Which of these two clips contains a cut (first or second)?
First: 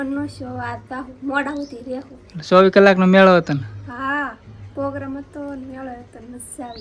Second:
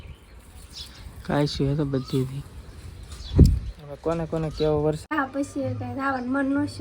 second